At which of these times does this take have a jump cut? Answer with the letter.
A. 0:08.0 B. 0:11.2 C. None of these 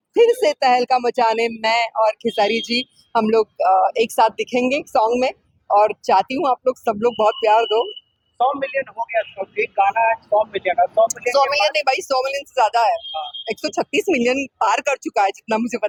C